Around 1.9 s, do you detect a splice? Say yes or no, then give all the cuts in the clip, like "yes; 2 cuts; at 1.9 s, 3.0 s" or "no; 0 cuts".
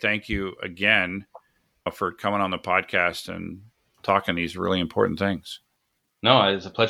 yes; 1 cut; at 1.9 s